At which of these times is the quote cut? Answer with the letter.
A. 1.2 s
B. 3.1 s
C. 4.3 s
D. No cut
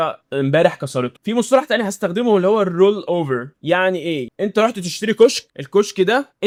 D